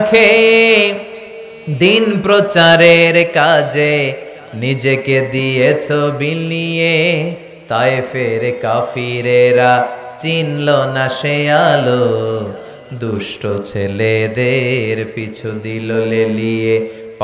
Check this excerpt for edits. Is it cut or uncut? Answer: uncut